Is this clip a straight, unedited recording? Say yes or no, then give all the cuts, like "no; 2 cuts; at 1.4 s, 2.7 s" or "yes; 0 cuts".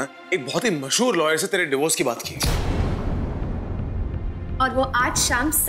yes; 0 cuts